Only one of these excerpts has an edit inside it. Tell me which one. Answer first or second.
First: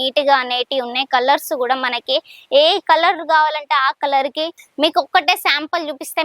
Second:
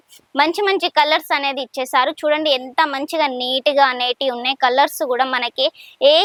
first